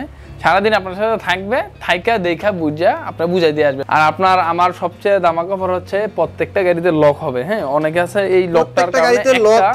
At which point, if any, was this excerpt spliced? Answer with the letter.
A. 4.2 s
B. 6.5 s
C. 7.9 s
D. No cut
A